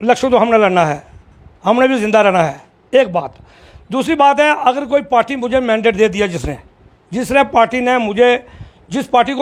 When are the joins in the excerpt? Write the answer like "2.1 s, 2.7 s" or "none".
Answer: none

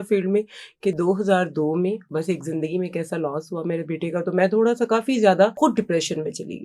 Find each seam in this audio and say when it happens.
2.0 s, 5.5 s

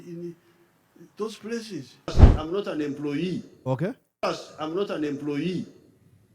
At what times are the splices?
2.1 s

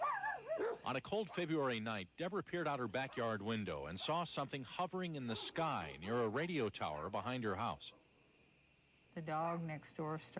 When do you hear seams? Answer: 7.7 s

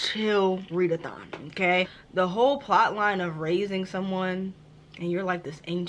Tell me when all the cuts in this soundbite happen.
1.9 s

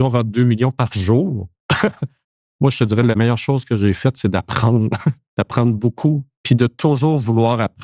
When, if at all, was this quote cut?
2.1 s, 3.2 s, 6.3 s

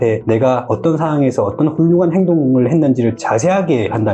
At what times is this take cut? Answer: none

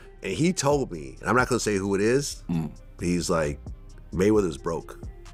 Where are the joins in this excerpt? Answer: none

